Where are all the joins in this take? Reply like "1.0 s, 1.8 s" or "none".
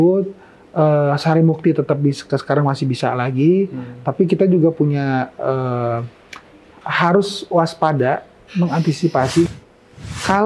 9.5 s